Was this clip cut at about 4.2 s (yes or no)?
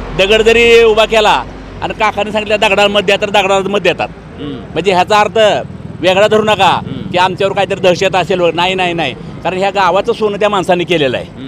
no